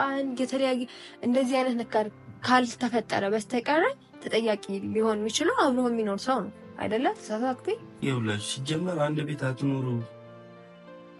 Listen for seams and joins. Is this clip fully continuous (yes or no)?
no